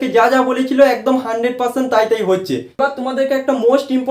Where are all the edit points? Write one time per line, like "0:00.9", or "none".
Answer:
0:02.7